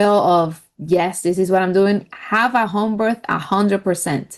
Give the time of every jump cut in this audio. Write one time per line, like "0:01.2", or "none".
none